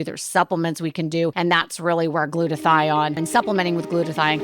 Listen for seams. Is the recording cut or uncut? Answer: cut